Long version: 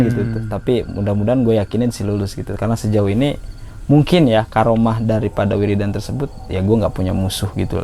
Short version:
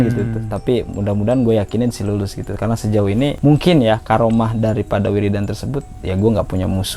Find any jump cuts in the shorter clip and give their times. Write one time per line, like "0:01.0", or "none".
0:03.4